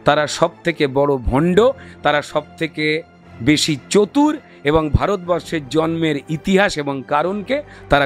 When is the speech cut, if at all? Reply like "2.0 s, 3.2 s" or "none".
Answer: none